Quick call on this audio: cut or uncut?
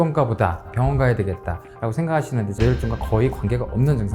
cut